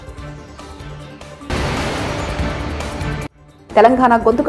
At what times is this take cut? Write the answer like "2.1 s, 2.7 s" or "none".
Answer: 1.5 s, 3.5 s